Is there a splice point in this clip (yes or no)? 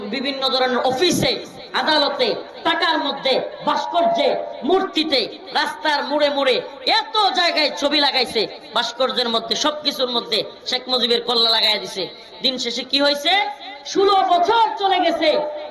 no